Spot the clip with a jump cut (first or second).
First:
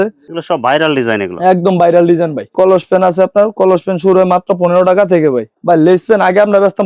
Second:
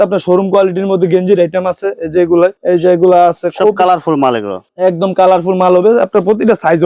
first